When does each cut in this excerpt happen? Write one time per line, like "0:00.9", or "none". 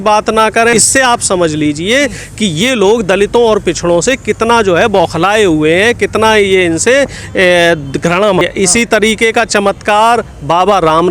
0:00.7
0:08.4